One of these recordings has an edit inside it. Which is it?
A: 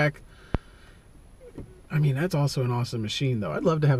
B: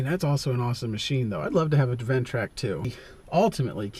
B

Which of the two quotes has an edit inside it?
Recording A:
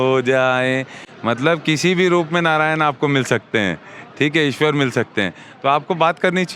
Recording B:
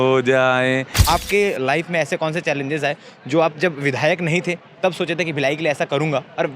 B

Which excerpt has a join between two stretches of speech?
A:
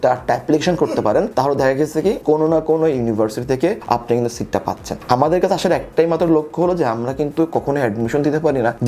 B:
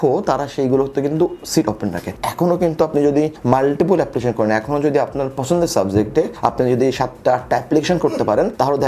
B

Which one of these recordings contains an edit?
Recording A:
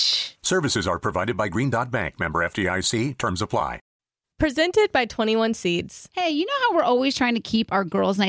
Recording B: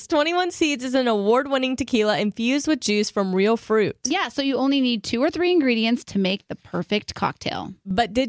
A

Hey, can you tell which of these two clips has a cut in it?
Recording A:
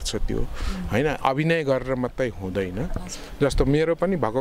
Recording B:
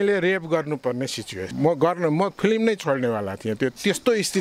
B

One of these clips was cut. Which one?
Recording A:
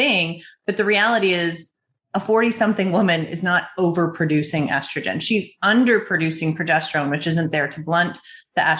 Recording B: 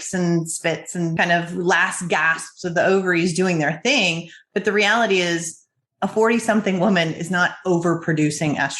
B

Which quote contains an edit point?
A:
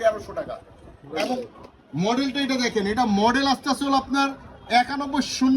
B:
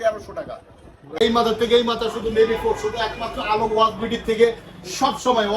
B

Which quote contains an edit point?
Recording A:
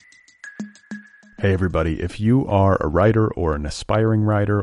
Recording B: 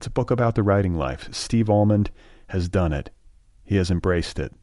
A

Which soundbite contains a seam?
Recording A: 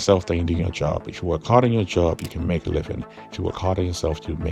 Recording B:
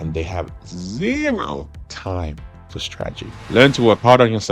B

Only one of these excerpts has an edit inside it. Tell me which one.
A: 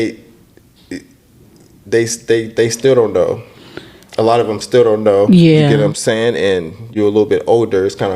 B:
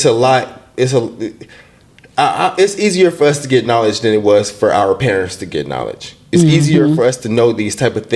A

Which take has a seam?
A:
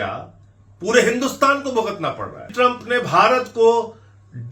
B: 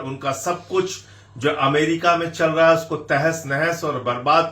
A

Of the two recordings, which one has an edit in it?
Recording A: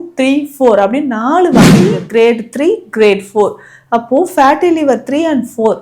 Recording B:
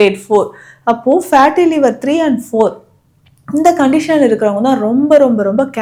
A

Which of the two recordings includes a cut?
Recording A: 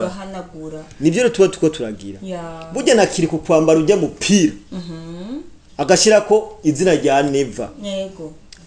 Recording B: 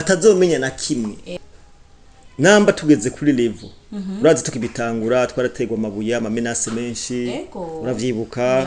B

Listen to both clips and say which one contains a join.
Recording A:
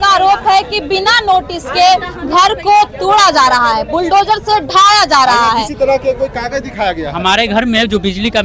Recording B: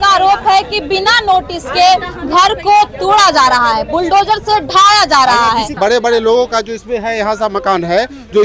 B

